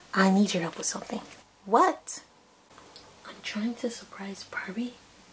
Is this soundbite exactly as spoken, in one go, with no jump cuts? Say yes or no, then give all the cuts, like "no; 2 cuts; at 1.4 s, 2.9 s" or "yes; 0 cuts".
yes; 0 cuts